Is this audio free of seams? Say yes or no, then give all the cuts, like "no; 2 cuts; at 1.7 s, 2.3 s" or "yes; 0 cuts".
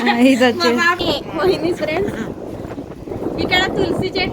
no; 1 cut; at 1.0 s